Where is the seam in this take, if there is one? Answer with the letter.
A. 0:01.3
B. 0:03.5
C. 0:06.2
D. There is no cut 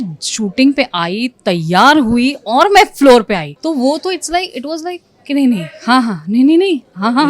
B